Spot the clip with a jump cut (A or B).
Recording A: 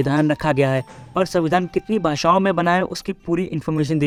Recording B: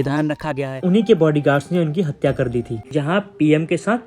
B